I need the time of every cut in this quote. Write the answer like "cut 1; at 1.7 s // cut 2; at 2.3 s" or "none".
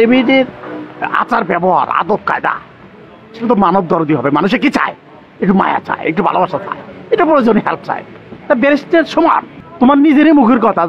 cut 1; at 9.6 s